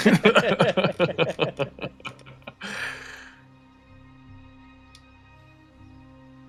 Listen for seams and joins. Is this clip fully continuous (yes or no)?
yes